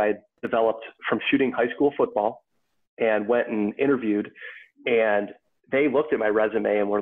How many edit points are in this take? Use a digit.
0